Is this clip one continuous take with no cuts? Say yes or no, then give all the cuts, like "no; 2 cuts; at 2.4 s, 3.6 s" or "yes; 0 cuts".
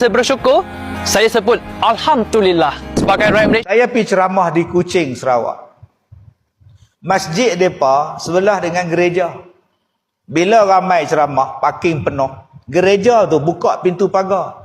no; 1 cut; at 3.6 s